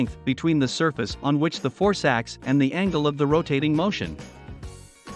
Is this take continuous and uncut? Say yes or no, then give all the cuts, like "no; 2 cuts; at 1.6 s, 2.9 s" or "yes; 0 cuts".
yes; 0 cuts